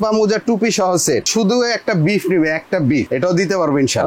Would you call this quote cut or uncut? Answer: cut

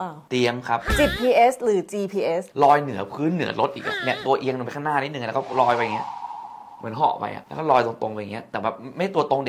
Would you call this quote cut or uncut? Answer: cut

